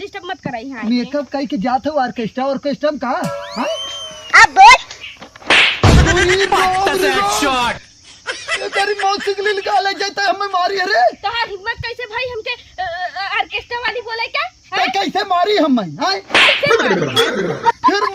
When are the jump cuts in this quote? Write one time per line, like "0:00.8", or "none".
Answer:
none